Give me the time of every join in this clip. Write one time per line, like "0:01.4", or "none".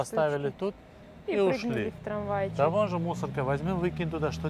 none